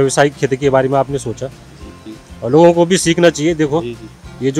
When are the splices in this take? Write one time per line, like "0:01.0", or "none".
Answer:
0:02.0